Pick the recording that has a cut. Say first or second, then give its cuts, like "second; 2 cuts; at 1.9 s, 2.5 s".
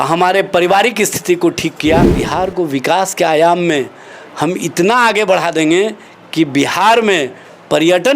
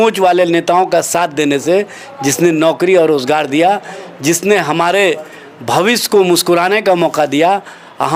first; 1 cut; at 2.2 s